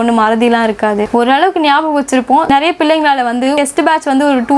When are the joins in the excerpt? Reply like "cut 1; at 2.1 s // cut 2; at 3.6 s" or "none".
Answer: cut 1; at 1.1 s // cut 2; at 2.5 s // cut 3; at 3.6 s